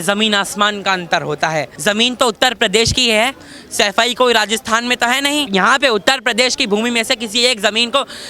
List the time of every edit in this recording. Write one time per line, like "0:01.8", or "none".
0:01.7
0:05.5